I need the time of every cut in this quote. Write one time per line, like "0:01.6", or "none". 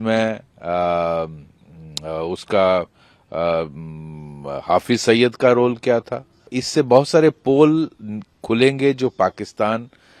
0:06.6

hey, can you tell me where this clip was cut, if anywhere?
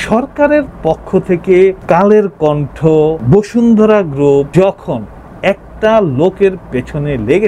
0:01.8
0:03.2
0:04.5

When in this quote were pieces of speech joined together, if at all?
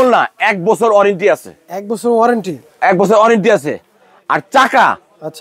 none

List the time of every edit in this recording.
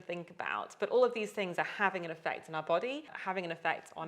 0:03.1

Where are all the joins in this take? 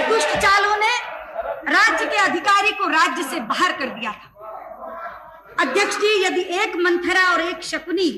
none

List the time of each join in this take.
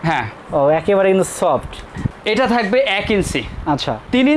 0:02.0

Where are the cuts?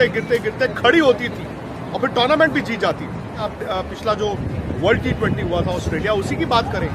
0:03.4

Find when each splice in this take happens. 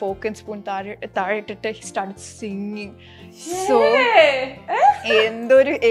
none

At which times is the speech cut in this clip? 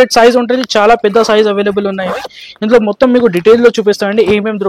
none

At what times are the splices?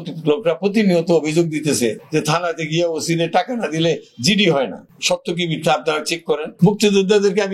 0:06.5

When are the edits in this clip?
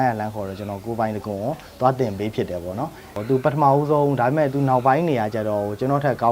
0:03.1

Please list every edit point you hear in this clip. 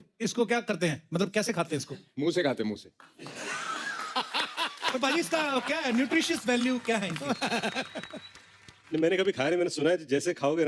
none

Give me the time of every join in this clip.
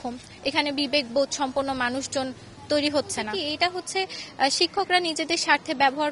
0:03.4

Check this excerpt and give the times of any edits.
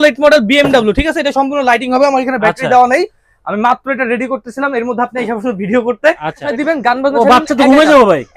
0:06.5

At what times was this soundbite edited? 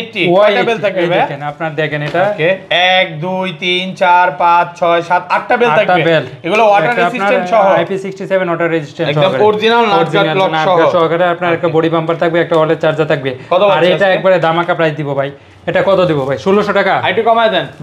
none

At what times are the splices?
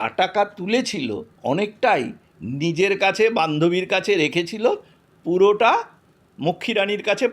0:01.3

